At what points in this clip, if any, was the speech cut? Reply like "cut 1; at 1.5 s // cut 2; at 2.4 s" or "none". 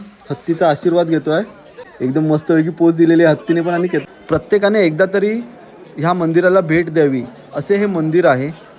cut 1; at 1.8 s // cut 2; at 4.0 s